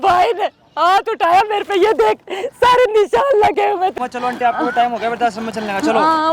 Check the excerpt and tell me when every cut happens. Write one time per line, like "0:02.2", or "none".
0:04.0